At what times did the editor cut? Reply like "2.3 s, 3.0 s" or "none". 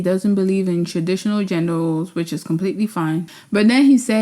3.3 s

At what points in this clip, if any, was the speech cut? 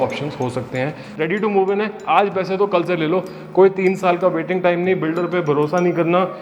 1.0 s

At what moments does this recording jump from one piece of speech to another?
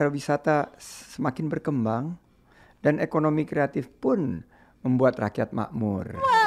none

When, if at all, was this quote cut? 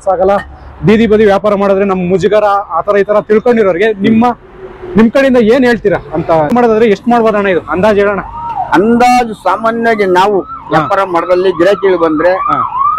6.5 s

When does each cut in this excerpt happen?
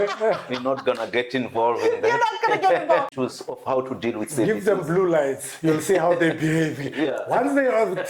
3.1 s

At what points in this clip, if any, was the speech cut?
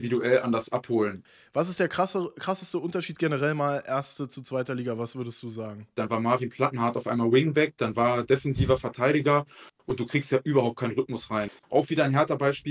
1.3 s, 5.9 s, 11.6 s

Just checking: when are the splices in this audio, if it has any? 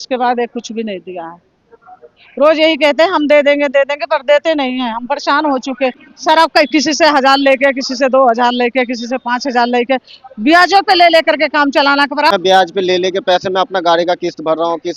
6.1 s, 12.3 s

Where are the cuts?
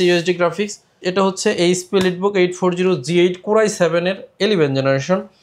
1.0 s

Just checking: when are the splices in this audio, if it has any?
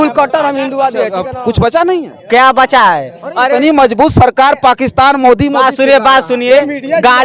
1.3 s

